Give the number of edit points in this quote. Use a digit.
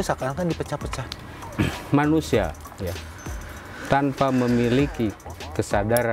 1